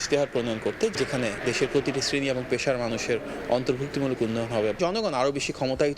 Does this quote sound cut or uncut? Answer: cut